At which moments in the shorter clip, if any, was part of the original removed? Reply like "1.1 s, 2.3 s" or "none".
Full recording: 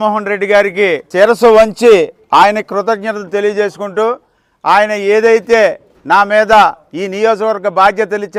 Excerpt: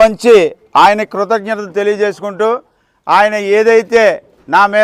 none